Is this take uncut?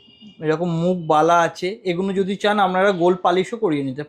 yes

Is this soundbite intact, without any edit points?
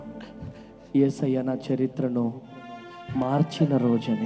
yes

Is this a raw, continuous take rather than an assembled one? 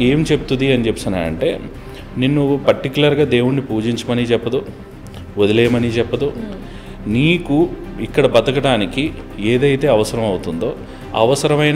yes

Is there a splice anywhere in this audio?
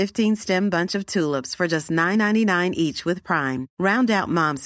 no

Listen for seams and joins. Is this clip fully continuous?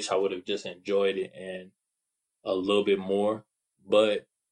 yes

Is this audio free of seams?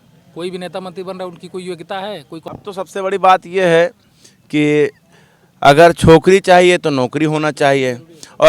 no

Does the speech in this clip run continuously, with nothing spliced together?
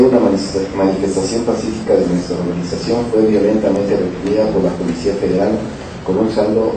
no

